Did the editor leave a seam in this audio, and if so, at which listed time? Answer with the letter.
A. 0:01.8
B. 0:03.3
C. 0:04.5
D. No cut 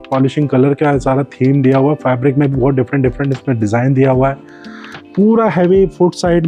D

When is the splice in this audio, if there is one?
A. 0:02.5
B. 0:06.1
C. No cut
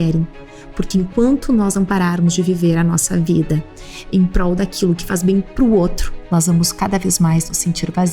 B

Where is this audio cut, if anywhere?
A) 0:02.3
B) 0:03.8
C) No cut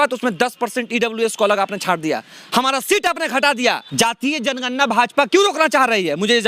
B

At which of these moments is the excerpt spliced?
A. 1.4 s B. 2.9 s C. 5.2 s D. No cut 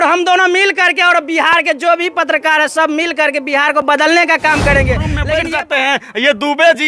C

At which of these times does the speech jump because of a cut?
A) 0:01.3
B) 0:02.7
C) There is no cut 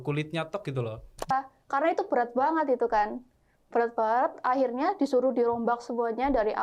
A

